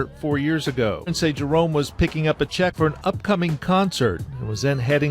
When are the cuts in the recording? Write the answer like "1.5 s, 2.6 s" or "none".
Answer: 1.1 s, 2.7 s